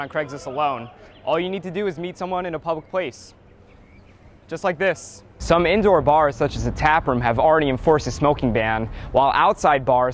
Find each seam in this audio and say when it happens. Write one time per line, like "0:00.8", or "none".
0:05.4